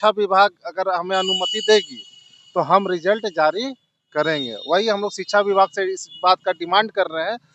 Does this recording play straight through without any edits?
yes; 0 cuts

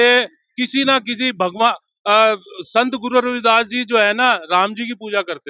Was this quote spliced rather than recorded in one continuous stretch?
no; 0 cuts

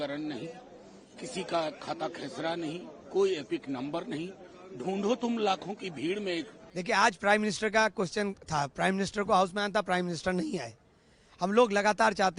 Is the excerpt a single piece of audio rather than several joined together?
no; 1 cut; at 6.7 s

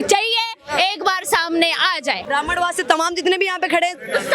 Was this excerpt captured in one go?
no; 1 cut; at 2.2 s

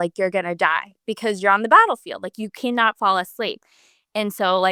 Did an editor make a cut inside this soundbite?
no; 0 cuts

